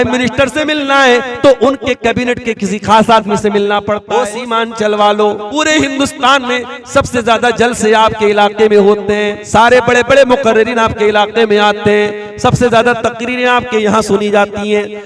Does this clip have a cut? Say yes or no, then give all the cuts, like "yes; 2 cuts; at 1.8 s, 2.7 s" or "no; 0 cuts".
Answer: yes; 3 cuts; at 4.0 s, 5.5 s, 9.4 s